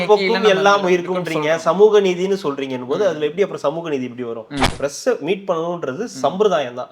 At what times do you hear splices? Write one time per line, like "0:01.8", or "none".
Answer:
0:04.7

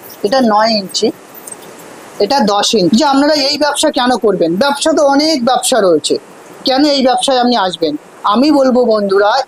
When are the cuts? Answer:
0:02.9

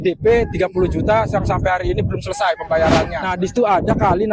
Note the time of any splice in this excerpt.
0:03.2

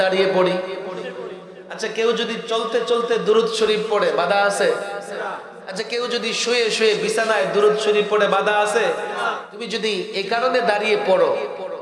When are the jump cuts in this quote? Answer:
0:09.5

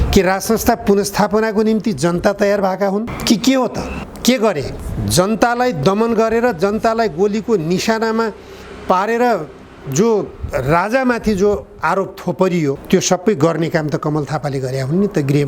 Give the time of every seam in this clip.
0:03.1
0:04.0
0:04.8
0:12.8

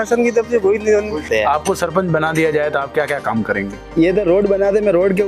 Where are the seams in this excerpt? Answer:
0:01.2
0:03.9

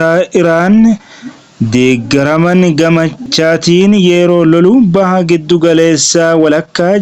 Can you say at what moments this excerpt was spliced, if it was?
0:03.2

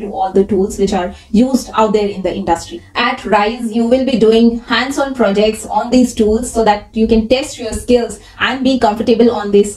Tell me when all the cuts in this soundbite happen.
none

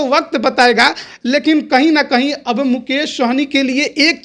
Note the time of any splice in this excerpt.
none

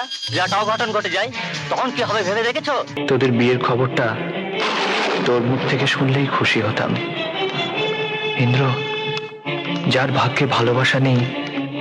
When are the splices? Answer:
0:02.9

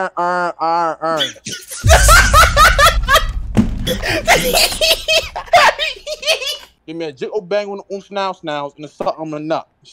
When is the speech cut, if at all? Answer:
0:03.8
0:06.9

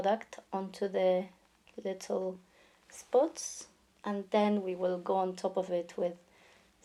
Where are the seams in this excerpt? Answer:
none

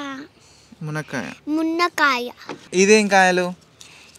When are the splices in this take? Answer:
0:02.6

